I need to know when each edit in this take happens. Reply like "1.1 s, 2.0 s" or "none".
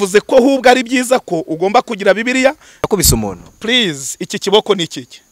2.9 s